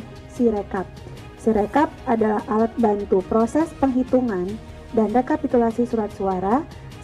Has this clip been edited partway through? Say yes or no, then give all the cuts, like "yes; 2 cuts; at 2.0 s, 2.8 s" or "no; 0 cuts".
yes; 1 cut; at 0.9 s